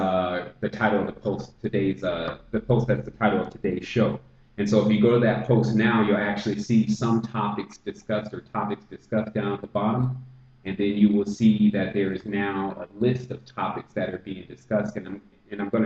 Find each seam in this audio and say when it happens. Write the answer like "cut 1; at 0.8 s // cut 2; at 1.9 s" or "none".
cut 1; at 14.0 s